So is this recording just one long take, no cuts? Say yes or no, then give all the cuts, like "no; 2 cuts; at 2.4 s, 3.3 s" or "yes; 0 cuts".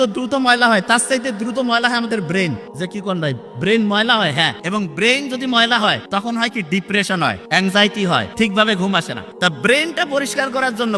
no; 6 cuts; at 2.7 s, 4.6 s, 6.0 s, 7.4 s, 8.3 s, 9.2 s